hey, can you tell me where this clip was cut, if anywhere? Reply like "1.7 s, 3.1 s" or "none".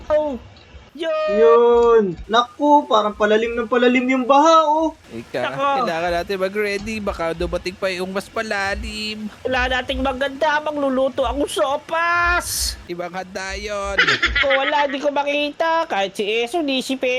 2.2 s, 14.3 s